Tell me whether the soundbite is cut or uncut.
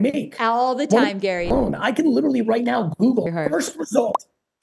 cut